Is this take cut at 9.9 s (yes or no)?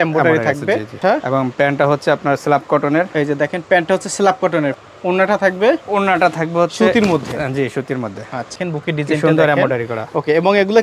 no